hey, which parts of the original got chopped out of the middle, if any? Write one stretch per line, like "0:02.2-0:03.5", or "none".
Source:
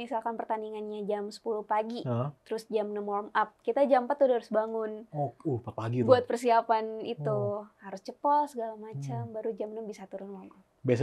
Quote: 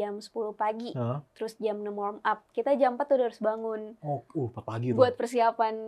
none